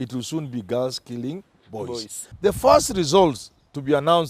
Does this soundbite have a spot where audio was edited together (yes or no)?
yes